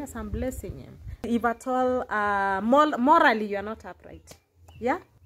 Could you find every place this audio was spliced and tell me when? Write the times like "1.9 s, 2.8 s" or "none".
1.3 s